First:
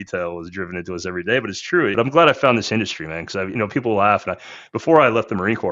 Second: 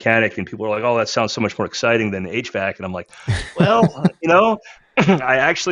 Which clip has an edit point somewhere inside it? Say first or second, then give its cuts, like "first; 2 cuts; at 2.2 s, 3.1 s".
first; 1 cut; at 1.9 s